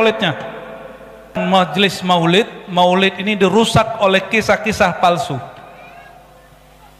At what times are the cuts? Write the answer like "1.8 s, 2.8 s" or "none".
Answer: 1.4 s

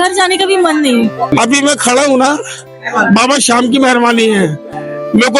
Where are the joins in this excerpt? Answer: 1.3 s

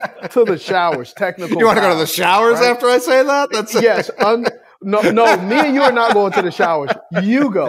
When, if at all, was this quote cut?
none

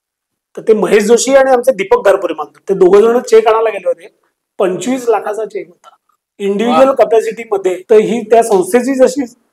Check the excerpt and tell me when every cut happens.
7.8 s

